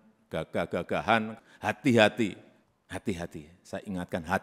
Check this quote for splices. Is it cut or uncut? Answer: cut